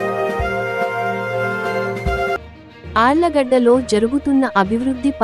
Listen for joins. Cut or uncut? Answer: uncut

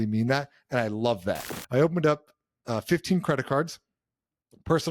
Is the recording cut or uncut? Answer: cut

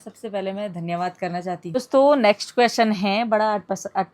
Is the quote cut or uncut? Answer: cut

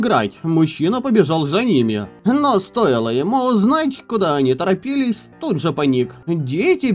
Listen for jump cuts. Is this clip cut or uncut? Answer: cut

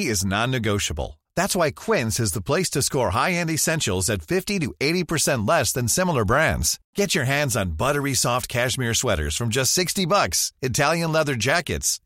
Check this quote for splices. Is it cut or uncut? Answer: uncut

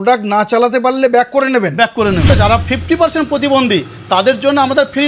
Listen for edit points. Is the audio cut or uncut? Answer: cut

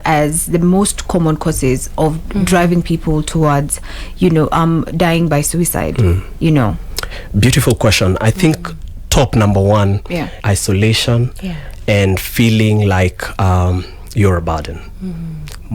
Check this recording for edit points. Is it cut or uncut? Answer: cut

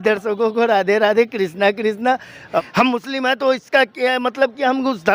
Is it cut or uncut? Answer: cut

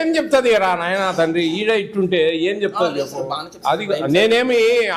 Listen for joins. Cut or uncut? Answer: uncut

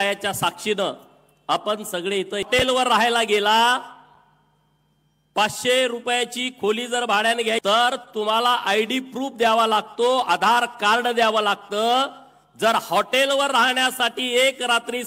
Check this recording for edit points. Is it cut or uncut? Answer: cut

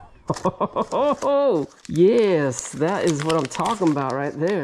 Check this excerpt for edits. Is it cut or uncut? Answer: uncut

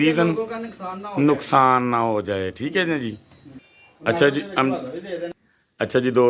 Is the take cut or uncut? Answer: uncut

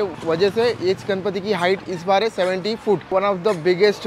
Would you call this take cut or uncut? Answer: cut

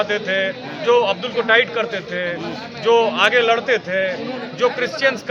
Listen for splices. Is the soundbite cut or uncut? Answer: uncut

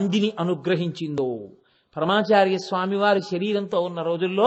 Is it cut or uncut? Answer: uncut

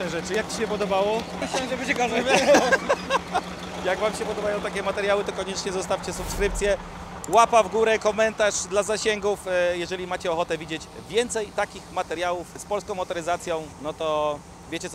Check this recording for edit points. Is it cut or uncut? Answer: cut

